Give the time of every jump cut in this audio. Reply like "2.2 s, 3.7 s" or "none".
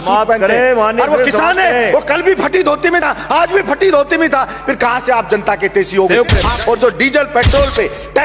6.5 s